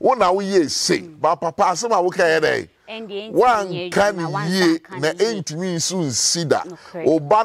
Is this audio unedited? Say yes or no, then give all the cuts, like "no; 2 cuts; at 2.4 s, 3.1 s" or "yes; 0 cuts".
yes; 0 cuts